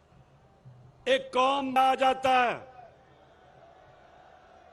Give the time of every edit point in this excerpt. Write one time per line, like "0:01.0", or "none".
0:01.8